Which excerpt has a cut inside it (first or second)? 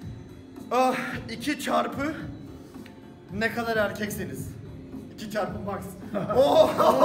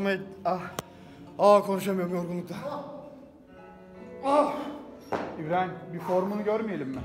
second